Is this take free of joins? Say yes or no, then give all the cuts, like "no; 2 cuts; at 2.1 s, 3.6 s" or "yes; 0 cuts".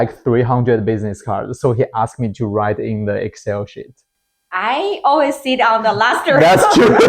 no; 1 cut; at 4.0 s